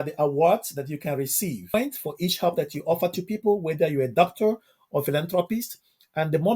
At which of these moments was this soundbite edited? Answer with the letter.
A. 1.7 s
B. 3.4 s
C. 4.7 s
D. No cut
A